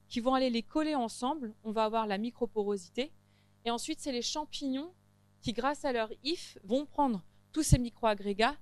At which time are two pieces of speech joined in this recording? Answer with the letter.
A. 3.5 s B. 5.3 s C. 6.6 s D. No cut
C